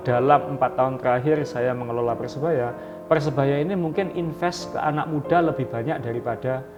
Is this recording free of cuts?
yes; 0 cuts

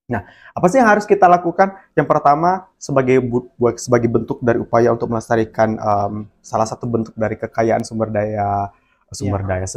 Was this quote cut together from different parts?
no; 0 cuts

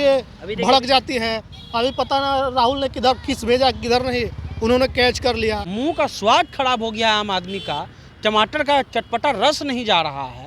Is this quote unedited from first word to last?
no; 1 cut; at 5.7 s

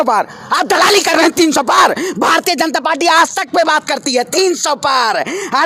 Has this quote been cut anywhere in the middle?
no; 0 cuts

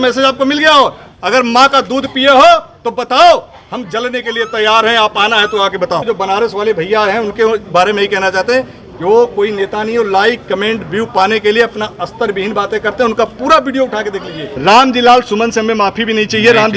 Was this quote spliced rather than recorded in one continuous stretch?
yes; 2 cuts; at 6.0 s, 14.4 s

